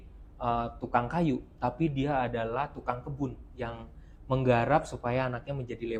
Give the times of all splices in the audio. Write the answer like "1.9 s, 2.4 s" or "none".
none